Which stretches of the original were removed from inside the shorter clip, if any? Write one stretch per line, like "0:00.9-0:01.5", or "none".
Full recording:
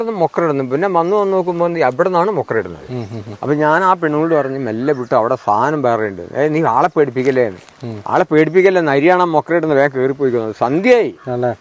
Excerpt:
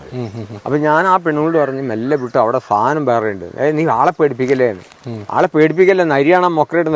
none